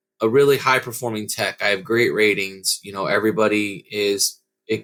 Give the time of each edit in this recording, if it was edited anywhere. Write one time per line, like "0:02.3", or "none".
none